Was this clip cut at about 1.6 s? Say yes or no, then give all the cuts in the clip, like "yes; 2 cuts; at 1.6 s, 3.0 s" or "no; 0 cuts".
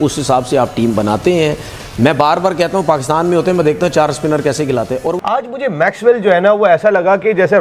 no; 1 cut; at 5.2 s